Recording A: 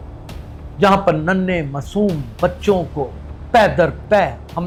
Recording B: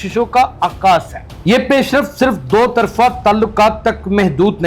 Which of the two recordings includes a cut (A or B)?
B